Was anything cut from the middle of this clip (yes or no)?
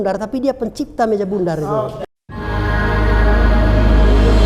yes